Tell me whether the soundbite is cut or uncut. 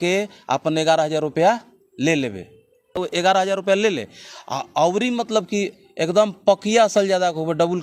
uncut